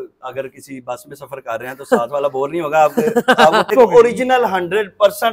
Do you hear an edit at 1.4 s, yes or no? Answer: no